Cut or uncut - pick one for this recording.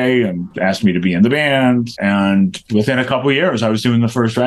cut